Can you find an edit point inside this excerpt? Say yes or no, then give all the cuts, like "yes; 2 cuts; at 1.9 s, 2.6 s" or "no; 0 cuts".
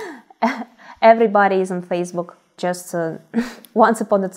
yes; 1 cut; at 2.6 s